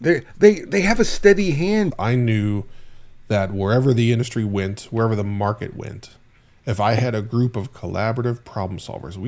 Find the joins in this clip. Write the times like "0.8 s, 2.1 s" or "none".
1.9 s